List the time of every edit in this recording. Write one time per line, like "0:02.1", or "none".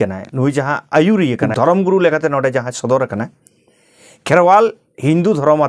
0:01.5